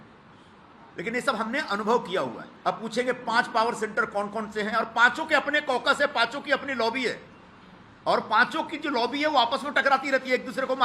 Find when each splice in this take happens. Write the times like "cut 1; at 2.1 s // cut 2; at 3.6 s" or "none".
cut 1; at 2.5 s